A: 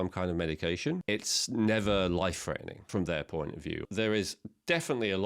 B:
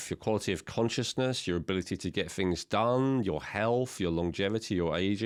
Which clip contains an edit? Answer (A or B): A